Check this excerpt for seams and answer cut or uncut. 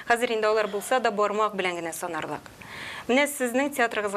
uncut